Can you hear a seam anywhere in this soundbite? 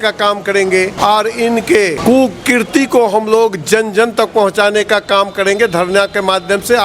yes; 2 cuts; at 0.9 s, 2.0 s

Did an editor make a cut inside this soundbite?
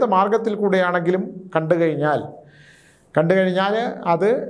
no; 0 cuts

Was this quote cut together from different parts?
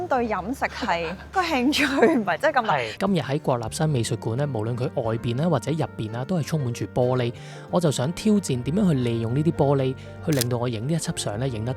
yes; 2 cuts; at 1.2 s, 3.0 s

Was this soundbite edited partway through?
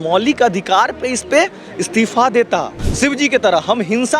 yes; 1 cut; at 2.8 s

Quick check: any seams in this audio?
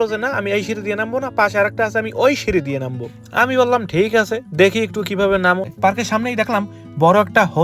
yes; 1 cut; at 5.7 s

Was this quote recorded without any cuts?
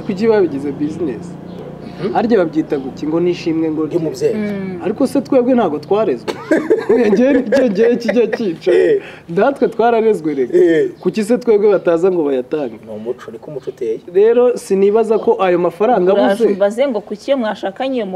yes; 0 cuts

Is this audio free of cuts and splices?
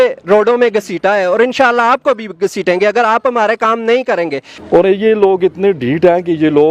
no; 1 cut; at 4.5 s

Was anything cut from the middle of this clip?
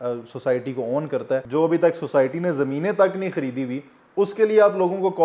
yes; 1 cut; at 1.5 s

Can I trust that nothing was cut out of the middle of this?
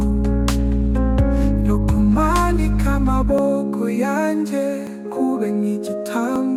yes; 0 cuts

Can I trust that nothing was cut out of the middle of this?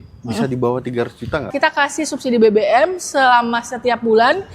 no; 1 cut; at 1.5 s

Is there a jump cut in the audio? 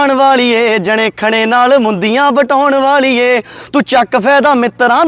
no; 0 cuts

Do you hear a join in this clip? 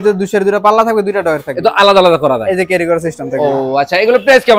no; 0 cuts

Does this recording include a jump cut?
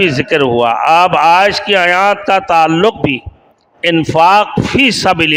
no; 0 cuts

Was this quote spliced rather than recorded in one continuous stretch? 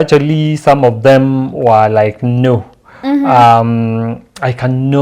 no; 0 cuts

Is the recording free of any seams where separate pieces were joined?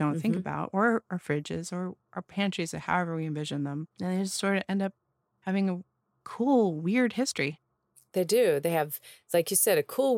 yes; 0 cuts

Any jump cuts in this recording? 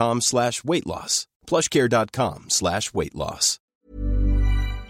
yes; 1 cut; at 3.7 s

